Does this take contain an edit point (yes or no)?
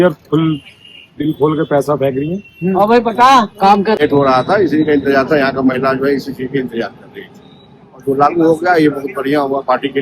yes